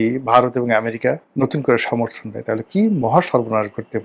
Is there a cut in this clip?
yes; 1 cut; at 1.3 s

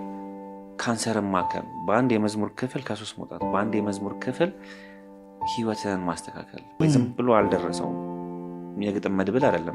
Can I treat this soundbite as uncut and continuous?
no; 1 cut; at 6.8 s

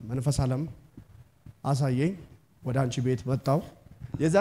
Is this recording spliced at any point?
no; 0 cuts

